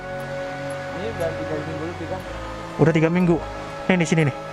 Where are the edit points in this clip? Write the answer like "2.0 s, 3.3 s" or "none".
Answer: none